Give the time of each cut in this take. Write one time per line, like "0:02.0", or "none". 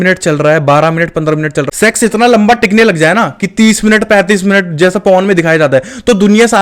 0:01.6